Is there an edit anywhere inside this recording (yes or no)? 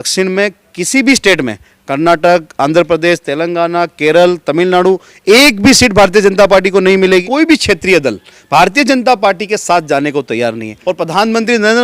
yes